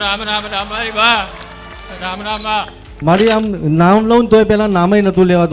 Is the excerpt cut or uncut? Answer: cut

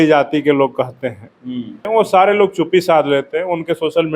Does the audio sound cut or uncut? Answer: cut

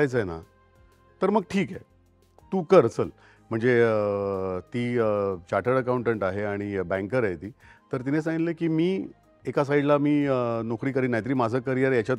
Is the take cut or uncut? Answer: uncut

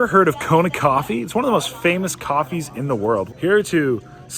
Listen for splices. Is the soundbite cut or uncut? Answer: cut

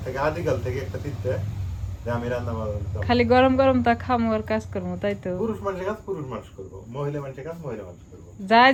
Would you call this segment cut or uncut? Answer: uncut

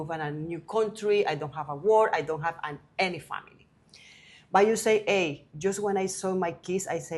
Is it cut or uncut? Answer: uncut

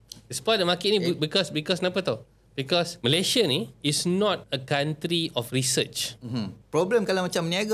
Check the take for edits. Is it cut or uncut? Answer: cut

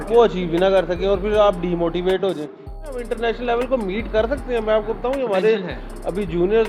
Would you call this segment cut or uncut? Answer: cut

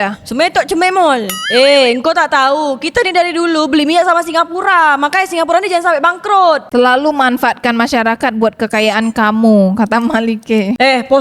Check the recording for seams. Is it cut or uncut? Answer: cut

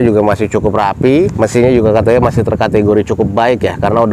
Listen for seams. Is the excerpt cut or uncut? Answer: cut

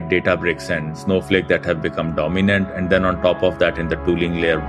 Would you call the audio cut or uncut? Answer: cut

